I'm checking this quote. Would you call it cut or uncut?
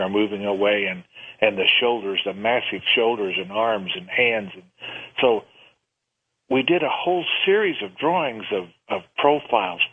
uncut